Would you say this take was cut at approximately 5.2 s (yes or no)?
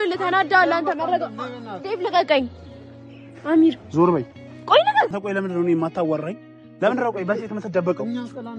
yes